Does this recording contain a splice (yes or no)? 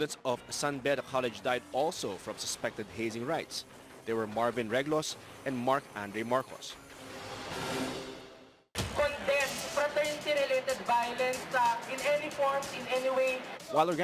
yes